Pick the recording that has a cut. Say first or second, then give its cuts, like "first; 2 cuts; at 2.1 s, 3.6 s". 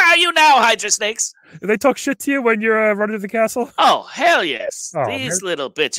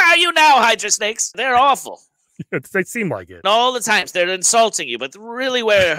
second; 2 cuts; at 1.4 s, 3.3 s